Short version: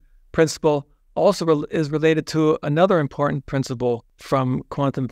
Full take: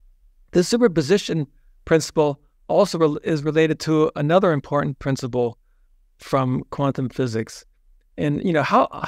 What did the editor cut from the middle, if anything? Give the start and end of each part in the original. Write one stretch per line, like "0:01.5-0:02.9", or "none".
0:05.7-0:06.1